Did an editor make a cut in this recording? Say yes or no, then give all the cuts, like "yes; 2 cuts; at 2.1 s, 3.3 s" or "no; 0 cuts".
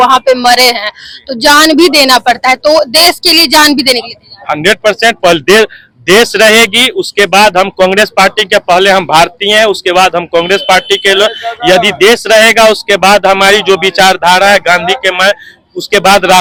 no; 0 cuts